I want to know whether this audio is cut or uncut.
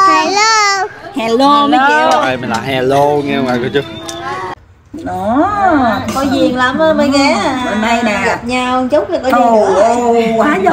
cut